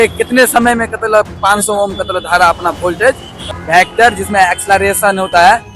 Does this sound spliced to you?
yes; 1 cut; at 3.4 s

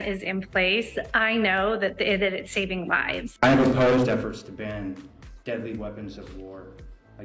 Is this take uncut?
yes; 0 cuts

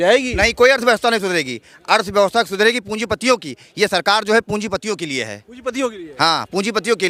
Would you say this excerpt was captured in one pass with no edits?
yes; 0 cuts

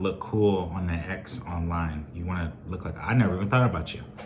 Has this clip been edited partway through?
no; 0 cuts

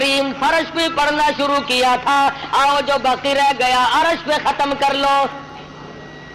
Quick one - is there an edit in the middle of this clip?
no; 0 cuts

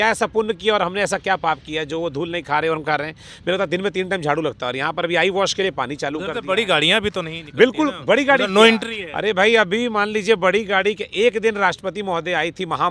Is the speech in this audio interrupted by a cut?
no; 0 cuts

